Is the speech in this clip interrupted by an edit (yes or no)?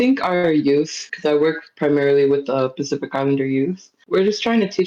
yes